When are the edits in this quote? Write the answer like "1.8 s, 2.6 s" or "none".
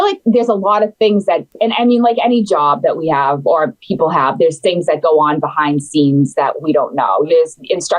1.5 s, 7.3 s